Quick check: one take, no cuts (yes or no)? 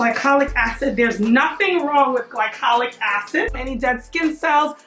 no